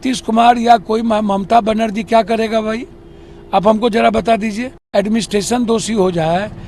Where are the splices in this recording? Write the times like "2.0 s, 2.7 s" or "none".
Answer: 4.7 s